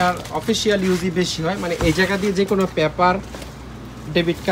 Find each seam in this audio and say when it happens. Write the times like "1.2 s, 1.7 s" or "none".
none